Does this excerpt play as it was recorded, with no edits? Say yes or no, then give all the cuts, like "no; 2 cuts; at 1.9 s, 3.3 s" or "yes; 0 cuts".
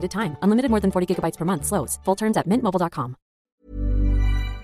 no; 1 cut; at 3.6 s